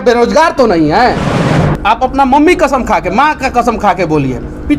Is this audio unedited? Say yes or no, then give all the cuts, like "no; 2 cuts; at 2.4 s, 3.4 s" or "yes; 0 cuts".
no; 1 cut; at 1.6 s